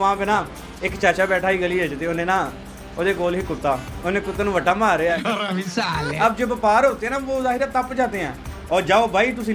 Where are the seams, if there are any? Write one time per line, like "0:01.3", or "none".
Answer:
0:05.7